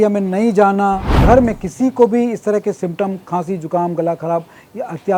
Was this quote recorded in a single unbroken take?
no; 1 cut; at 1.2 s

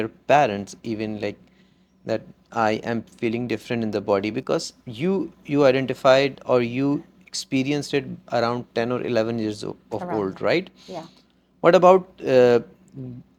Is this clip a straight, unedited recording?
yes; 0 cuts

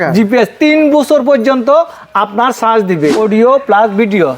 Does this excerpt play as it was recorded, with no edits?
no; 1 cut; at 3.2 s

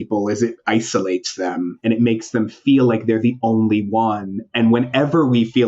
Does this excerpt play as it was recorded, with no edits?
no; 1 cut; at 1.7 s

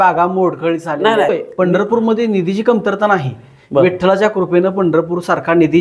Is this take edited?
yes; 1 cut; at 1.3 s

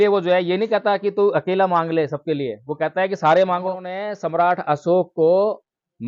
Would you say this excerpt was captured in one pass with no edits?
no; 1 cut; at 4.1 s

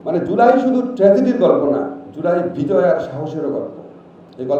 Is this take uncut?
yes; 0 cuts

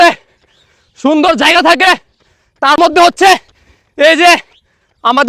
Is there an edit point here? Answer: yes; 1 cut; at 2.8 s

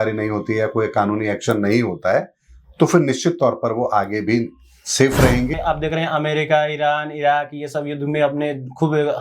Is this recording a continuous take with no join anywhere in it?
no; 1 cut; at 5.6 s

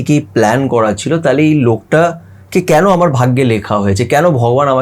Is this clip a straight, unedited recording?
yes; 0 cuts

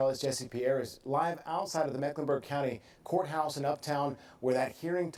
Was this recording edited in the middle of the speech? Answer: no; 0 cuts

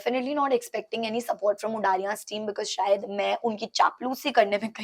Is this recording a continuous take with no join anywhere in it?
yes; 0 cuts

